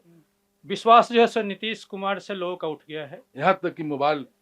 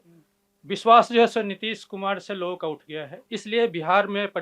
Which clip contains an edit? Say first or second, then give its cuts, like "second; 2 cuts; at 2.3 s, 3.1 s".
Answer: first; 1 cut; at 3.2 s